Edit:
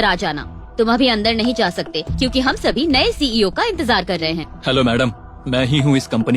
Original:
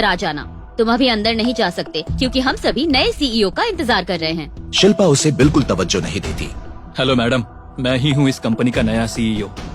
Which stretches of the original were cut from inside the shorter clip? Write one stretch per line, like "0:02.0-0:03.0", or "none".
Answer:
0:04.5-0:06.8